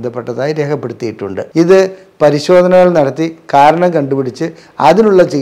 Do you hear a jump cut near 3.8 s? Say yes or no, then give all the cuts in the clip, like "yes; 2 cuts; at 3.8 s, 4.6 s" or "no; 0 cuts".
no; 1 cut; at 1.4 s